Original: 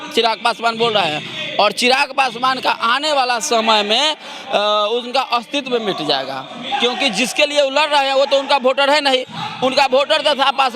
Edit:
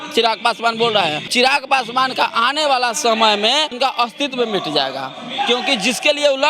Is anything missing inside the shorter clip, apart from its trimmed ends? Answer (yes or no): yes